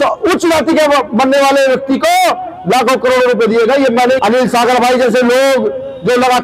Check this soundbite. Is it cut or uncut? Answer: cut